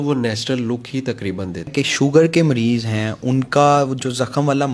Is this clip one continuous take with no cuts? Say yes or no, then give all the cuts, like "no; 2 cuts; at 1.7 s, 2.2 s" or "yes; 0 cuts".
no; 1 cut; at 1.8 s